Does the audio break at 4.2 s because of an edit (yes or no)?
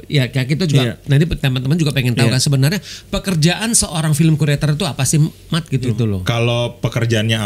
no